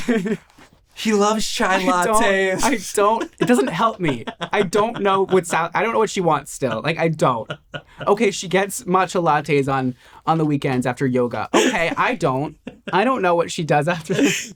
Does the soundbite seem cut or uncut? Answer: uncut